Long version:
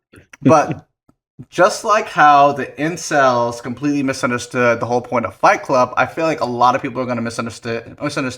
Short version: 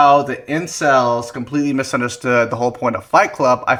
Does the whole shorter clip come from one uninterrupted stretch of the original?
yes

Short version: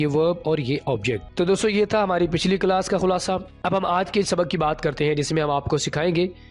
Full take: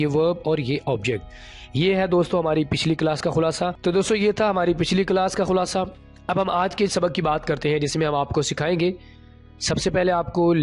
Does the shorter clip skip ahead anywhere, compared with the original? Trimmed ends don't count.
yes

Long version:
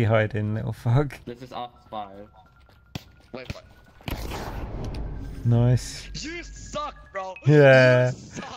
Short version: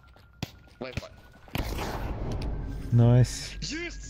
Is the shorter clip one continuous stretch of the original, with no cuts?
yes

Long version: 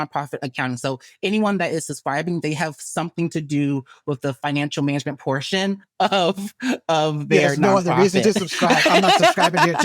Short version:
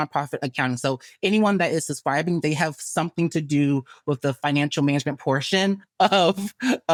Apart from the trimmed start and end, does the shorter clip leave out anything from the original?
no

